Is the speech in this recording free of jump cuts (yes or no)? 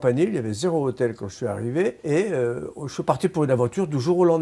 no